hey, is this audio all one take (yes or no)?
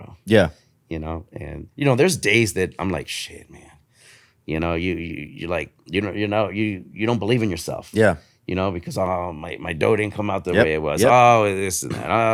yes